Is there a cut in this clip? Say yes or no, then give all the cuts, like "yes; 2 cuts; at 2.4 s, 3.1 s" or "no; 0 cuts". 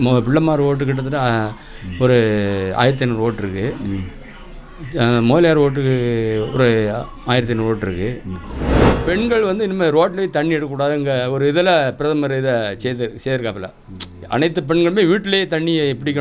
yes; 1 cut; at 9.0 s